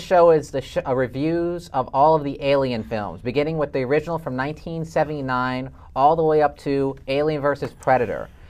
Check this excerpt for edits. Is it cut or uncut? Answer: uncut